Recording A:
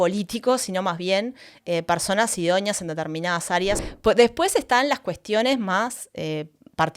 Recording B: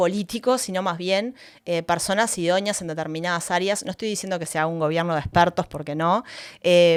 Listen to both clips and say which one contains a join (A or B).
A